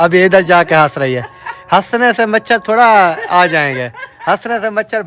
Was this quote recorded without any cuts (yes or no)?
yes